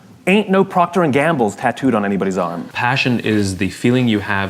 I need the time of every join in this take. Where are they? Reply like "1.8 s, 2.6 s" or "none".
2.7 s

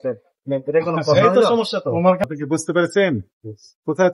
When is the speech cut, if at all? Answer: 2.2 s

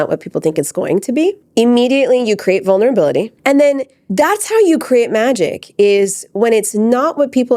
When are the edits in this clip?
1.4 s, 3.4 s

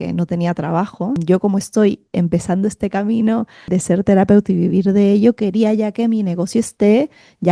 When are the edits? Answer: 1.2 s, 3.7 s

